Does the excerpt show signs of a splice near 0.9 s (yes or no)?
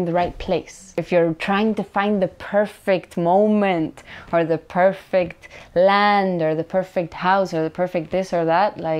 yes